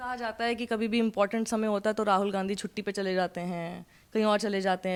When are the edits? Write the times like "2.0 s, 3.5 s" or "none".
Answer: none